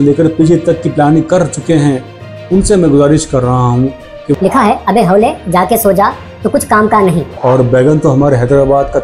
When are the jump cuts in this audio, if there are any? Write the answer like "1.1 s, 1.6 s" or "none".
4.4 s, 7.3 s